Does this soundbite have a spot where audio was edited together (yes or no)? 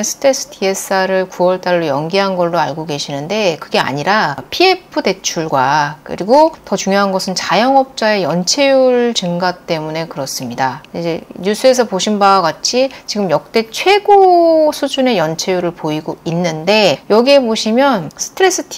no